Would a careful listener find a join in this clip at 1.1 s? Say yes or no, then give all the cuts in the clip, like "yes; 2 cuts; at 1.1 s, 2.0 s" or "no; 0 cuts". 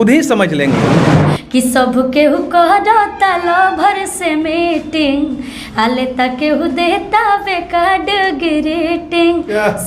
yes; 1 cut; at 1.1 s